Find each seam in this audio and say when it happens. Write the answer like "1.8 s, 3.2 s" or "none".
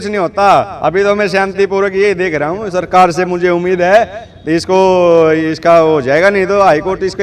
none